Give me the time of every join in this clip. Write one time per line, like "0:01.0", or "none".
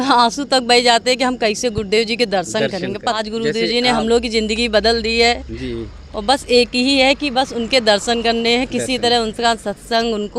0:03.2